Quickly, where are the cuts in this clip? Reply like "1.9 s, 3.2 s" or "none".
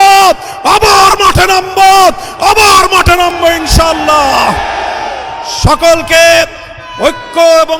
none